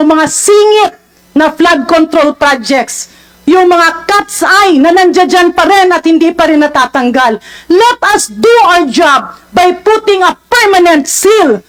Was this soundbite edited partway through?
no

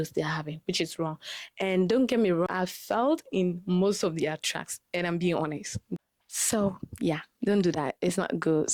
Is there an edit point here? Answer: yes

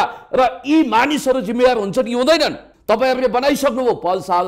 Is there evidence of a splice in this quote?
yes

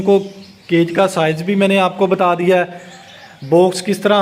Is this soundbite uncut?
yes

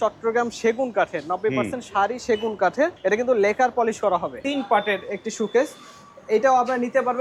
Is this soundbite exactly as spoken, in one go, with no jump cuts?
no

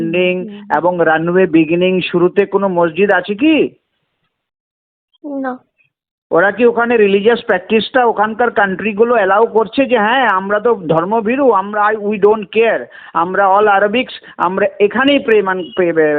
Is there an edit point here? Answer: no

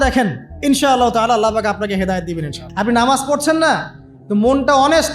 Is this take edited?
yes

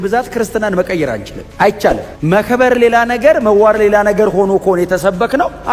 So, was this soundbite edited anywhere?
no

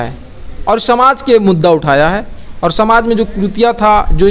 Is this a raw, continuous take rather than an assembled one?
yes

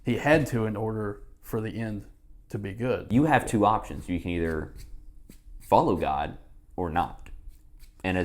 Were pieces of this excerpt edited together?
yes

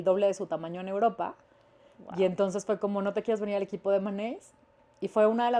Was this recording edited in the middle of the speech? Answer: no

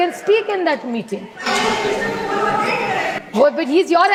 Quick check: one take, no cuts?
yes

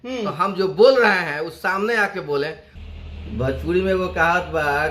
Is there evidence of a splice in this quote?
yes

